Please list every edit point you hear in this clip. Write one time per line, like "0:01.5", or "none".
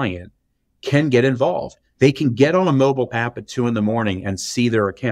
none